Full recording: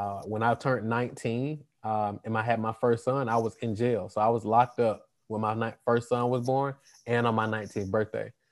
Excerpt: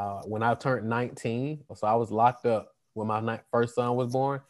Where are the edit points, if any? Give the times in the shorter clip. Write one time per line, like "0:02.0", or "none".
0:01.7